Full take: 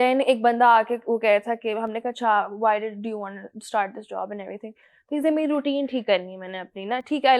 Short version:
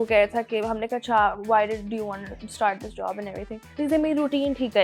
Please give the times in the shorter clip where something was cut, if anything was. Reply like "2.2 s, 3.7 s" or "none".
3.6 s